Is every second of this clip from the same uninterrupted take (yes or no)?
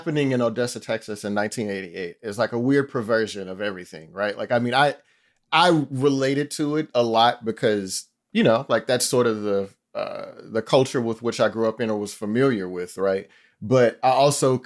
yes